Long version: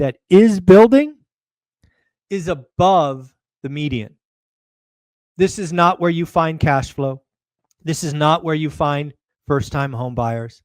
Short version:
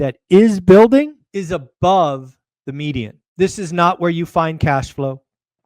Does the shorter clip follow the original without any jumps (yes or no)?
no